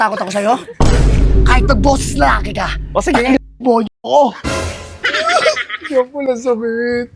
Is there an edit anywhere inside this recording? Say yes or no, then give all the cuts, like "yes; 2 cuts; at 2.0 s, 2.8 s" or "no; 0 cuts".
no; 0 cuts